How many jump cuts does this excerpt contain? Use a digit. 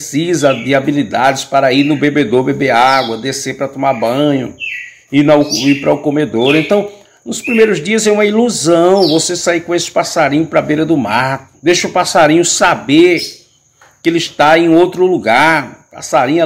1